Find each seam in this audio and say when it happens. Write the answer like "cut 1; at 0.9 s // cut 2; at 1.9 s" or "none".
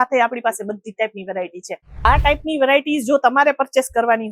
cut 1; at 2.0 s